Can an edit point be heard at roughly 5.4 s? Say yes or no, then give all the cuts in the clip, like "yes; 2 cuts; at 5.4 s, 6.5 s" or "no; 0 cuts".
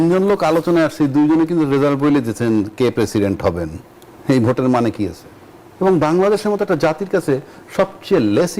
yes; 1 cut; at 5.4 s